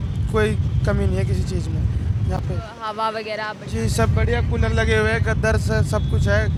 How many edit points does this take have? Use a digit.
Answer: 0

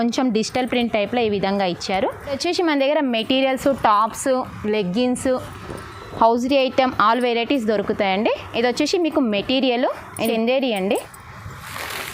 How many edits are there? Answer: 2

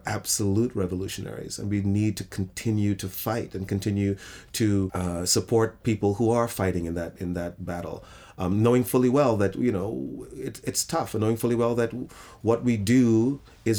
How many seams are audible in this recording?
0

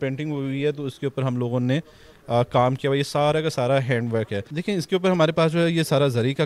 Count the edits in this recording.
1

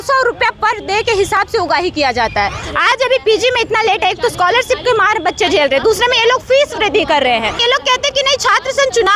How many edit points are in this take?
2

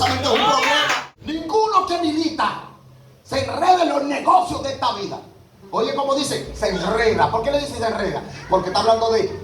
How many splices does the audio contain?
1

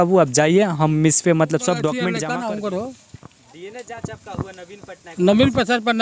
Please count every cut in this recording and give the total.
1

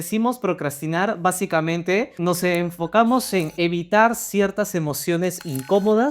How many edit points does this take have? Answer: 1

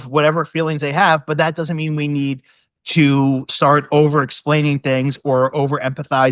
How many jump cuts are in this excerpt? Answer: 1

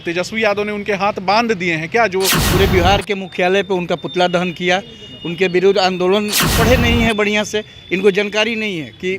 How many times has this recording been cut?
2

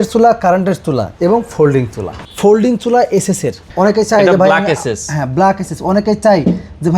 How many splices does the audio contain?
2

